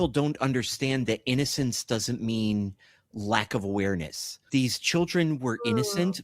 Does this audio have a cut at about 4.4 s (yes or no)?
yes